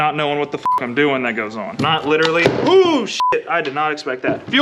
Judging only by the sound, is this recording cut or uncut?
cut